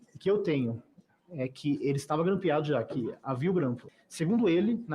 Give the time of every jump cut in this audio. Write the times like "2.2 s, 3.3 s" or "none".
3.8 s

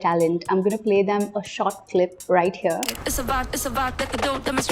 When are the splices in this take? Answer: none

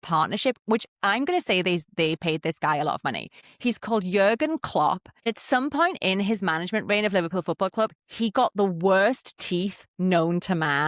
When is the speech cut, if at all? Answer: 5.2 s

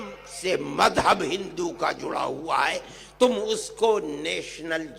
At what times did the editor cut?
none

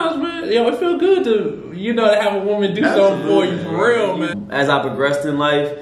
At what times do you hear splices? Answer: 4.4 s

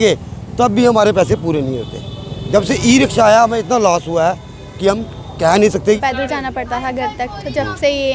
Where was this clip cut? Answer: 6.0 s

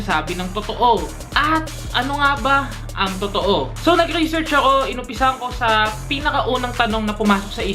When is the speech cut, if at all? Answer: 6.0 s

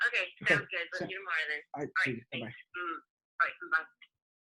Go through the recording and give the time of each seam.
none

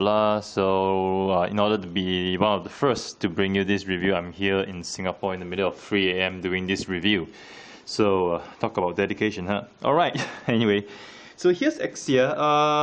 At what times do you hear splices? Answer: 9.1 s

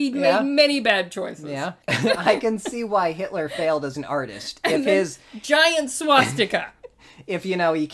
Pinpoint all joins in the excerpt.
1.8 s

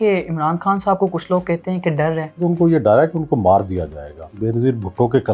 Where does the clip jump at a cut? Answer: 2.4 s, 4.4 s

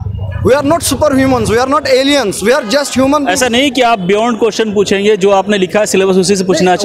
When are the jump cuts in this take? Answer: none

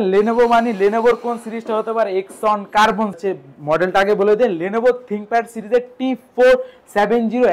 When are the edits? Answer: 3.2 s

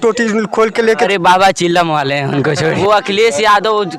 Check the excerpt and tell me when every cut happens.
1.0 s, 2.8 s

